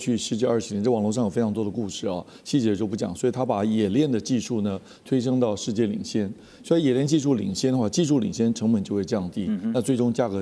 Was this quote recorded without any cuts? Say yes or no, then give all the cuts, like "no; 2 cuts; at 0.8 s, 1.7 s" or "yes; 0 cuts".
yes; 0 cuts